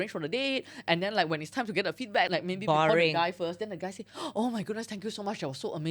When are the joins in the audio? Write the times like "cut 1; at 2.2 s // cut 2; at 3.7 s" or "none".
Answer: cut 1; at 2.3 s